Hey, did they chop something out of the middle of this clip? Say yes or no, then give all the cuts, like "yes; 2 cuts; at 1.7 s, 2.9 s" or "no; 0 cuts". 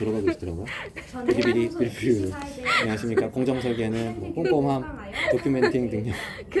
no; 0 cuts